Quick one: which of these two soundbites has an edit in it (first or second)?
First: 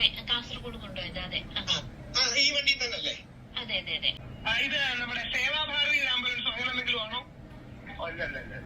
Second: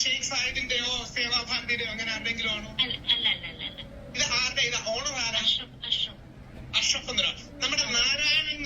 first